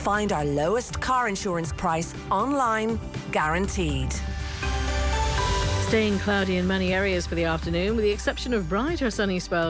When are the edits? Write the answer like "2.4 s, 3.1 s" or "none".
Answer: 5.9 s